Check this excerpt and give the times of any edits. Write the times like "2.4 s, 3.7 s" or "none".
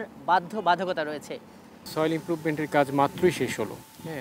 1.9 s